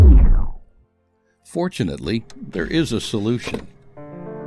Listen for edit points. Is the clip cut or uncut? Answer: uncut